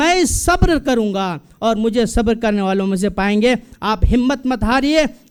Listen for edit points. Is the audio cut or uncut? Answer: uncut